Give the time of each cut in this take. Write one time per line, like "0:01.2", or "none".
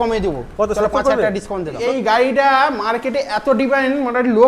0:01.8